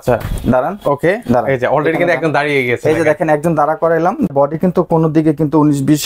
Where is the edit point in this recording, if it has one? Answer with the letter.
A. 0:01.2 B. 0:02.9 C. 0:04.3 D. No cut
C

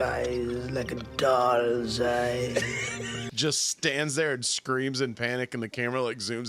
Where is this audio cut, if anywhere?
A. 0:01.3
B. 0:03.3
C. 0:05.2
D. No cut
B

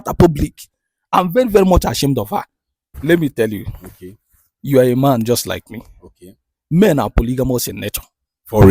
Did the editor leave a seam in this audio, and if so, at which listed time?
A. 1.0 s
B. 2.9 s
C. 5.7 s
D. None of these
B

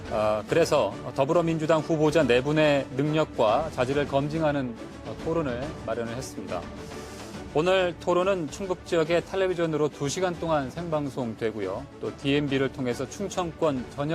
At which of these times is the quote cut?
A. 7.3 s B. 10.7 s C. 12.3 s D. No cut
D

